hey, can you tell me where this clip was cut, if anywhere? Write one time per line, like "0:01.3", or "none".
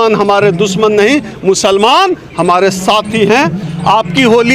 0:03.6

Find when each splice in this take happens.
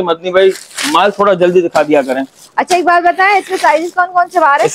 none

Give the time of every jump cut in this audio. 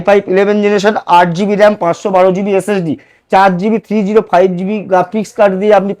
none

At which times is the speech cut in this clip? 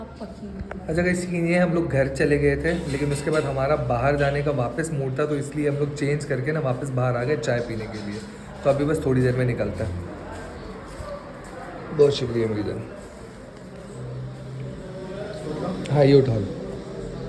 none

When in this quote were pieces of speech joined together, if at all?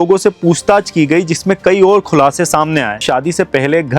0:03.0

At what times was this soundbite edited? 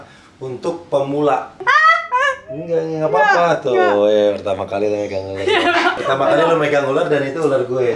0:01.5
0:06.0

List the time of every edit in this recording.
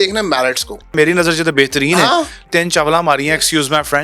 0:00.9
0:02.4

